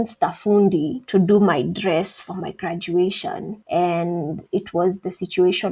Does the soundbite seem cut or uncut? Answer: uncut